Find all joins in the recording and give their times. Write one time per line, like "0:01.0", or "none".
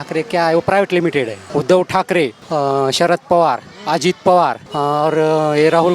0:01.4
0:02.4
0:04.6